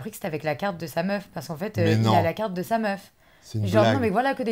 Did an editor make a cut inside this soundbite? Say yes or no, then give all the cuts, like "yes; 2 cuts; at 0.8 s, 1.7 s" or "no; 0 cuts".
no; 0 cuts